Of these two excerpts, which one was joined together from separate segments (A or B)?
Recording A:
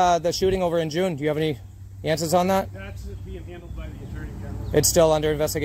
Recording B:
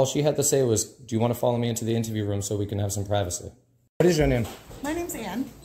B